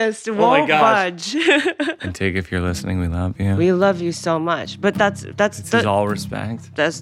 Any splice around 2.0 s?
yes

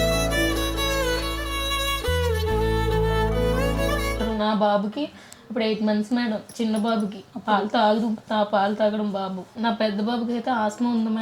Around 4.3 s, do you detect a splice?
yes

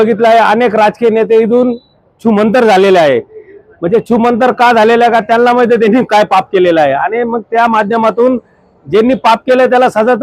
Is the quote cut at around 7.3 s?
no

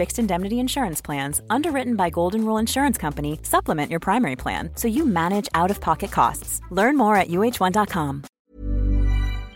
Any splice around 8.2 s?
yes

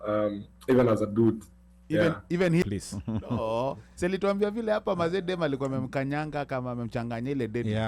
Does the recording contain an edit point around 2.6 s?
yes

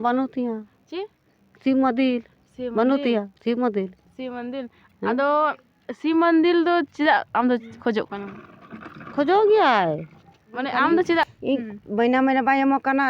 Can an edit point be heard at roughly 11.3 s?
yes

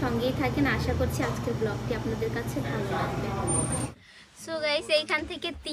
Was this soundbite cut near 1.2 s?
no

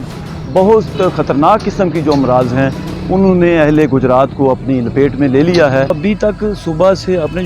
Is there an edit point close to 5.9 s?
yes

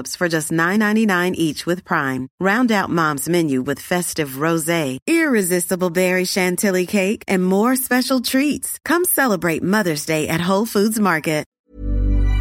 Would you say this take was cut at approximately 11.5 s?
yes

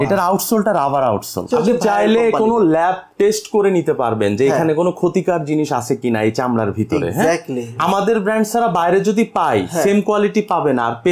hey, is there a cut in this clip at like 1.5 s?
yes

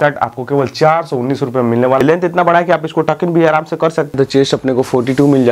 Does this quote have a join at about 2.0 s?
yes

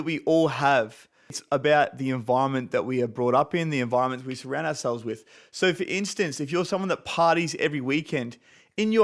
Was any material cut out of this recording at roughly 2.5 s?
no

